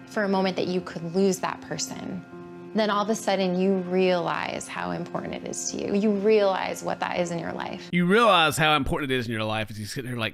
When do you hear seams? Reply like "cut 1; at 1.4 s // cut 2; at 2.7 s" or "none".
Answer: none